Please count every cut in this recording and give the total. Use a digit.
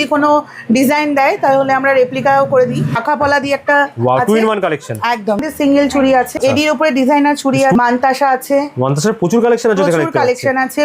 4